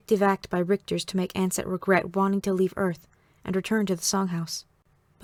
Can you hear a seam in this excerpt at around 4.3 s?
no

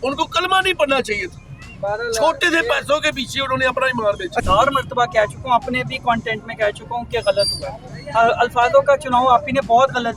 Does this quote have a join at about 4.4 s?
yes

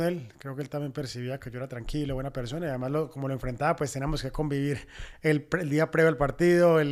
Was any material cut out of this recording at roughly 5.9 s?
no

